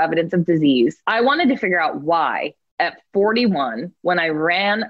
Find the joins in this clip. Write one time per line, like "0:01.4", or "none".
0:01.0
0:03.9

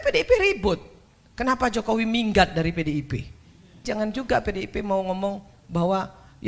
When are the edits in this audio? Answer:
0:03.8

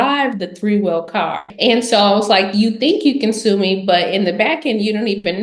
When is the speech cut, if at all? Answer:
0:01.5

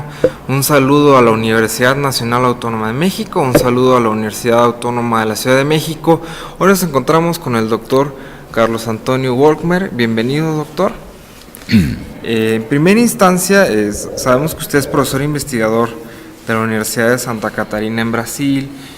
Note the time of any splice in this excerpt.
0:08.5

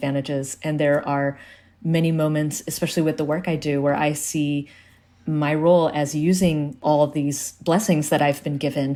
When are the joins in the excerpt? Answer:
none

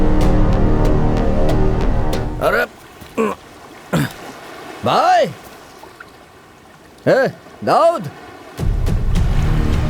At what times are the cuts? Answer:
0:02.3

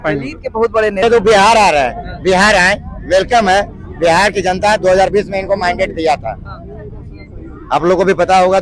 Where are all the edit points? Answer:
0:01.0

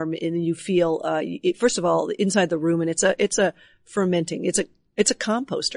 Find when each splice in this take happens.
none

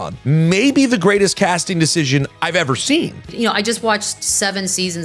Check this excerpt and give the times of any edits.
0:03.3

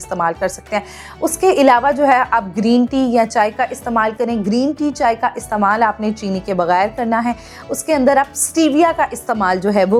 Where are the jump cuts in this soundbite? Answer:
none

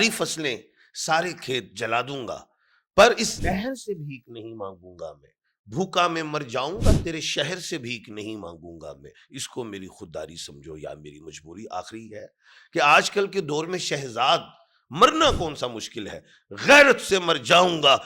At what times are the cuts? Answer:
0:03.4

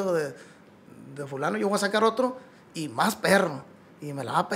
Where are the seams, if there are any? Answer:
none

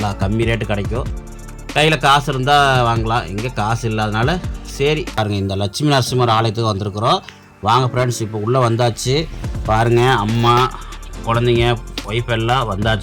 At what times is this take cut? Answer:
0:05.2

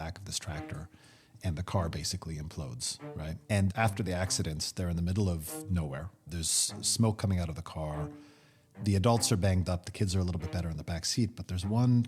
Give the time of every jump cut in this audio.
0:03.7

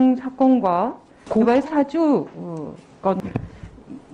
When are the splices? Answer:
0:03.2

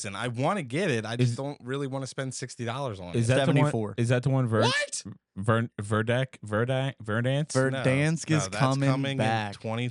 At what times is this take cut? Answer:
none

